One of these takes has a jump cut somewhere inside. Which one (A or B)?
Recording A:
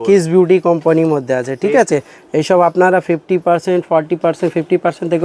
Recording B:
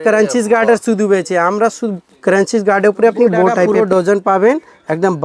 B